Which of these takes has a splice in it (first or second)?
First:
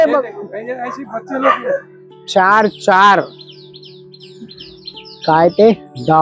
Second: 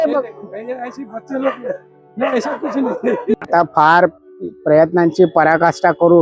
first